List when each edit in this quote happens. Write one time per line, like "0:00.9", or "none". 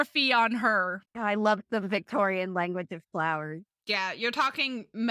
0:01.0
0:03.7